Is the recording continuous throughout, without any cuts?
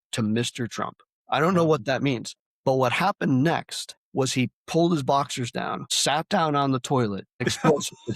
no; 1 cut; at 7.2 s

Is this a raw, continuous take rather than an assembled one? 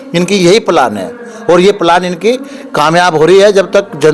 yes; 0 cuts

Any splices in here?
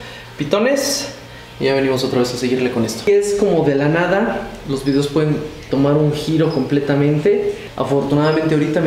yes; 2 cuts; at 3.1 s, 7.7 s

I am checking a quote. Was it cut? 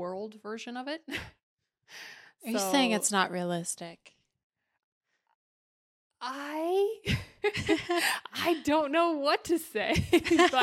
no; 0 cuts

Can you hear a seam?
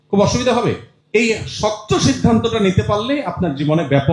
yes; 1 cut; at 0.9 s

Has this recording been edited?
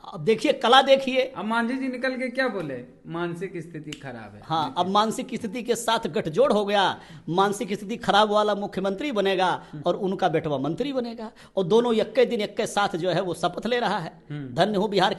no; 0 cuts

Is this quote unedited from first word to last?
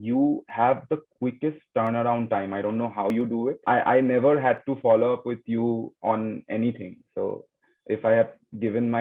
no; 1 cut; at 3.1 s

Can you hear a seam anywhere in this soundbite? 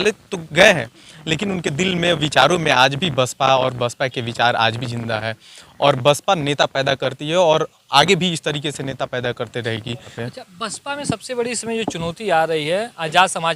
yes; 1 cut; at 10.2 s

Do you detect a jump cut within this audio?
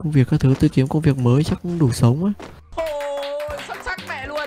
no; 0 cuts

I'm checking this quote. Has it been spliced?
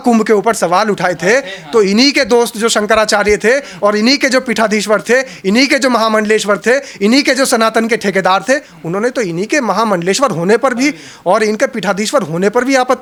no; 0 cuts

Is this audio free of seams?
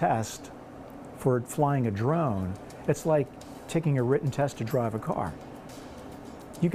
yes; 0 cuts

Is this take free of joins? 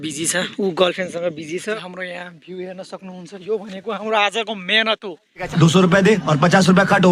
yes; 0 cuts

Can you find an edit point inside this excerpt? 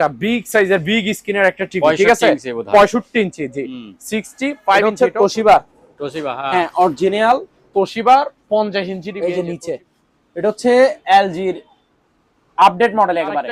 yes; 2 cuts; at 4.8 s, 9.1 s

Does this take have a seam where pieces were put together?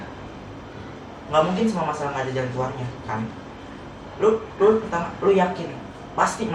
no; 0 cuts

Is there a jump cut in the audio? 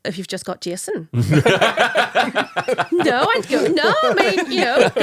no; 0 cuts

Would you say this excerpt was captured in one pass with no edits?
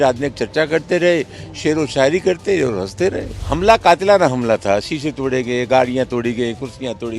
no; 1 cut; at 3.3 s

